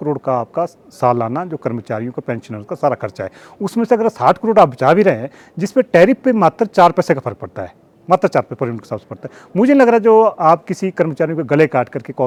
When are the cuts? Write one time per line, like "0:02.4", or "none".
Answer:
none